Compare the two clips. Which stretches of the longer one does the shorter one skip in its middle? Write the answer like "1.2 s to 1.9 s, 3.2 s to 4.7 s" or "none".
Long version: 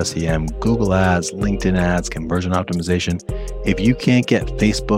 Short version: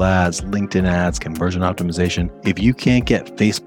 3.2 s to 3.6 s